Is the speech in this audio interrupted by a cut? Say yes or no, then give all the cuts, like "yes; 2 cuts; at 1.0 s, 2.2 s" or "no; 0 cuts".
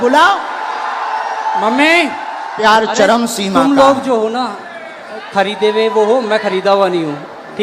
yes; 1 cut; at 2.6 s